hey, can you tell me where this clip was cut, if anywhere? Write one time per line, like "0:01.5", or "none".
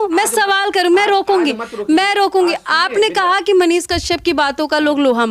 none

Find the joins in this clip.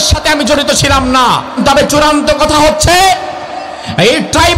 0:01.6

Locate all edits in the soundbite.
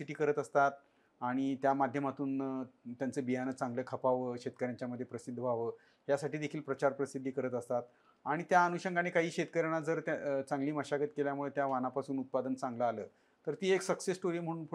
none

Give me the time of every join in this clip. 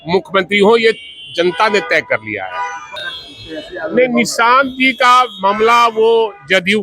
0:03.0

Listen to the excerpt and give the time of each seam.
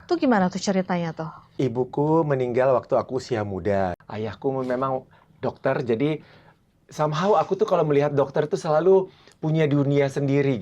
0:01.5
0:03.9

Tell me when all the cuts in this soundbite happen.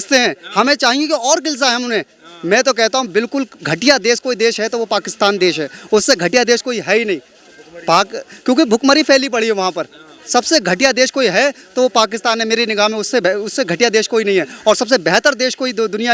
none

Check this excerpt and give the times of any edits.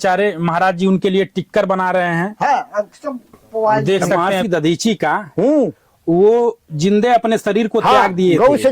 0:04.2

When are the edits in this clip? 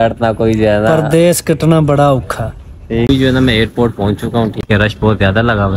0:03.1
0:04.6

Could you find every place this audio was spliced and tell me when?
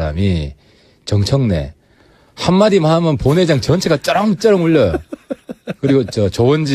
0:04.6

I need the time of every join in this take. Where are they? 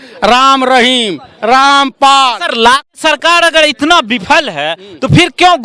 0:02.9

